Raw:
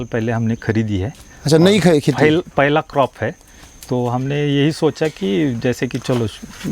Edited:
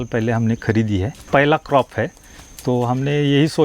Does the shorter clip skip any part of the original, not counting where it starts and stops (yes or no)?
yes